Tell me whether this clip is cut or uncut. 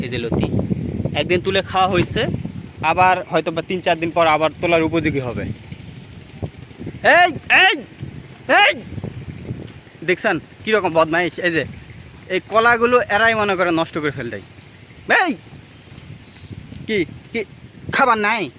uncut